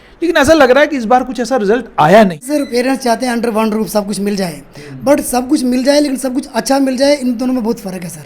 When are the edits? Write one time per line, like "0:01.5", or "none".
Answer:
0:02.5